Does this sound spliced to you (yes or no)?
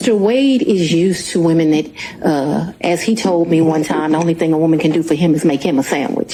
no